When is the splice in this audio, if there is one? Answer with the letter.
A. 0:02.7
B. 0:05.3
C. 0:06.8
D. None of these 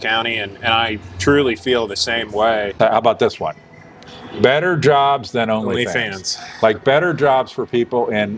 A